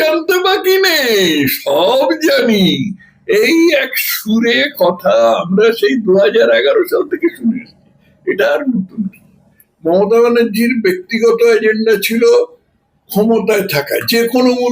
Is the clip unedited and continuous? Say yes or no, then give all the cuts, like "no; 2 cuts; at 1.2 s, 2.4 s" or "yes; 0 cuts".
no; 1 cut; at 9.5 s